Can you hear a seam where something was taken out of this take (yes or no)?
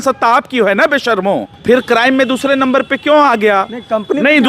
yes